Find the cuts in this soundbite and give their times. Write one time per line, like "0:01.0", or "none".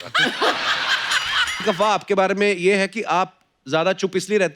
0:01.6